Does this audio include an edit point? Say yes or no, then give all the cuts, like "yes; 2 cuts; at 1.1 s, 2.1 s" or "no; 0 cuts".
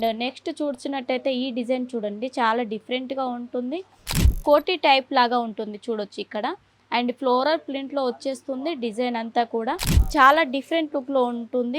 yes; 2 cuts; at 4.1 s, 9.9 s